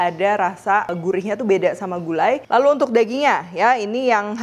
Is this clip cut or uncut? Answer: cut